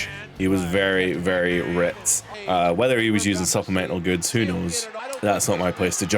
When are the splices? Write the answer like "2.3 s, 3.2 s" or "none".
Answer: 2.4 s, 5.1 s